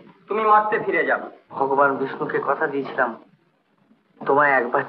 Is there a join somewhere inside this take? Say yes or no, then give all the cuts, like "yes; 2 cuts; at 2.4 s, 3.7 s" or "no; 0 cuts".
yes; 1 cut; at 1.4 s